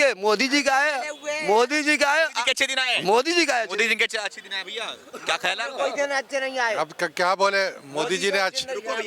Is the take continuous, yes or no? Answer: yes